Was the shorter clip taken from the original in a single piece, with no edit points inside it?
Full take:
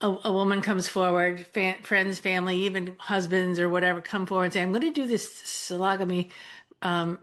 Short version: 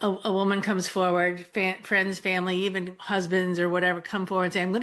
yes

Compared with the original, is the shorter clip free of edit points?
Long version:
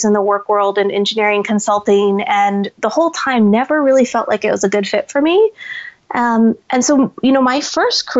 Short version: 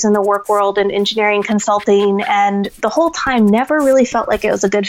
yes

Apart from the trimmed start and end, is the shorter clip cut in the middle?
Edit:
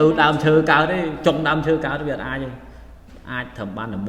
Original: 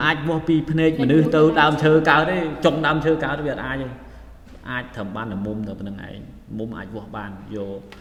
no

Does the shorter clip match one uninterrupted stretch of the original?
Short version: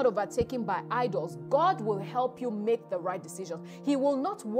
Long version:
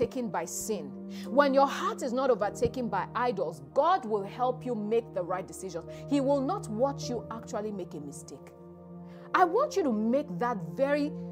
yes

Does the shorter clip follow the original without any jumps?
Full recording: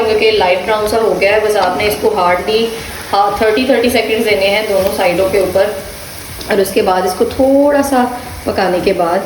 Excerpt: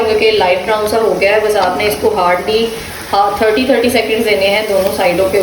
yes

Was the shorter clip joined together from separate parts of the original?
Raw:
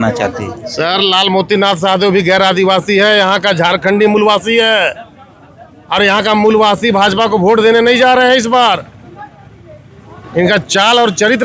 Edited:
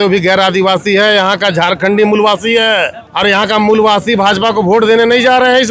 yes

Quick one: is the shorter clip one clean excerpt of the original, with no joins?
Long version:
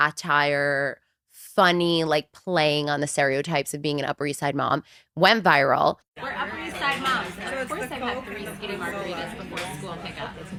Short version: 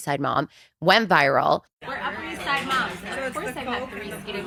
yes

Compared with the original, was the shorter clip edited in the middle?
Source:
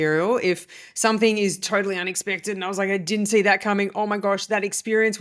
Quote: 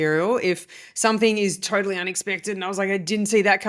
no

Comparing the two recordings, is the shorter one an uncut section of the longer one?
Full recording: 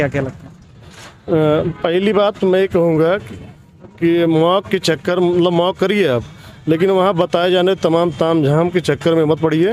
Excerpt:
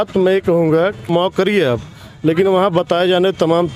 no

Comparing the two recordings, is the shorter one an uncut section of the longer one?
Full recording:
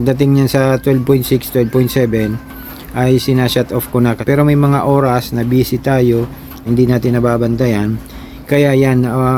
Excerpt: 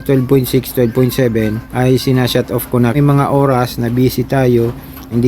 no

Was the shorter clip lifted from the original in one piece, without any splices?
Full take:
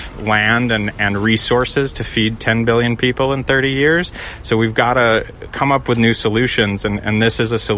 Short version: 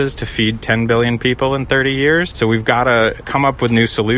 no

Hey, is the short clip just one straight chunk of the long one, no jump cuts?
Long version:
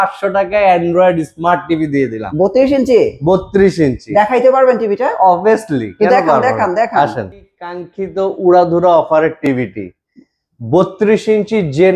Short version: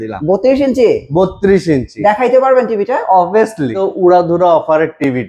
no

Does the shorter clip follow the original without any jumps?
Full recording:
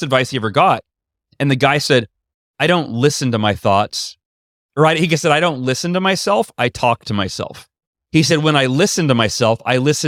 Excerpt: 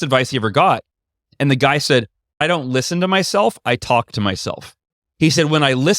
no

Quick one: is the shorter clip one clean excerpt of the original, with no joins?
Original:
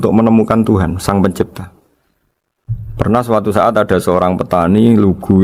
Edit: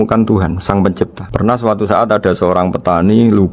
no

